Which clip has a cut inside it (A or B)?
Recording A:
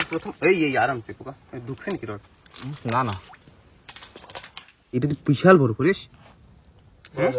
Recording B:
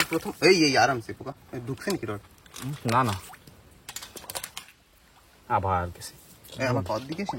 A